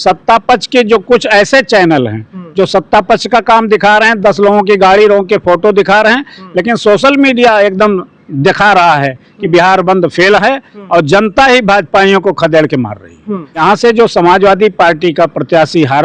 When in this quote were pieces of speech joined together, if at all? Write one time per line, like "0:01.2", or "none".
0:13.6

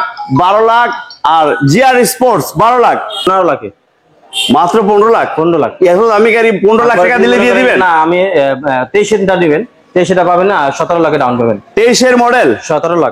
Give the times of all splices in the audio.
0:03.3

